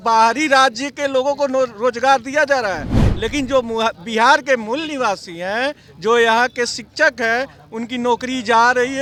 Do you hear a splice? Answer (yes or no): no